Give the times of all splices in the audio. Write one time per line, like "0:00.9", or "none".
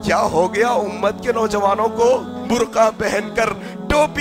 0:02.3